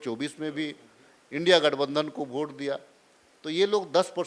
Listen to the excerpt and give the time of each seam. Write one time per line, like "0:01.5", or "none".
none